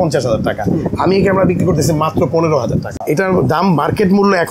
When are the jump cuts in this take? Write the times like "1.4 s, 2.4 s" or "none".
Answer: 2.9 s